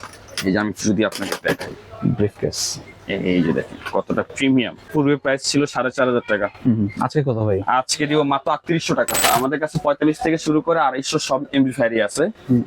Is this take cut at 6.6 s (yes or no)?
no